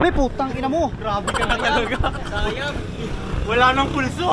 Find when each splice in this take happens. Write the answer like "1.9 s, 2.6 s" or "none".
none